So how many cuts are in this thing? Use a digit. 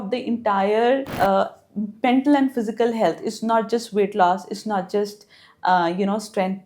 1